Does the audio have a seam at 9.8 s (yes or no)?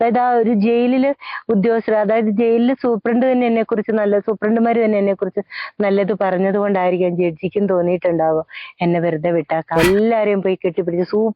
yes